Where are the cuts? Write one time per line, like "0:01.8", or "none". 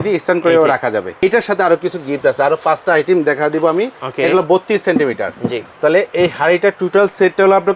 0:01.1